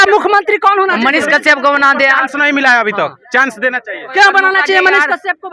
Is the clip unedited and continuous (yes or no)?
yes